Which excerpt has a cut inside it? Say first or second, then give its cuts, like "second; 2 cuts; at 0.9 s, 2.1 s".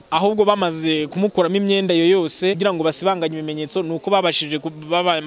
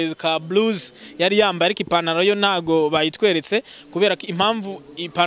first; 1 cut; at 2.6 s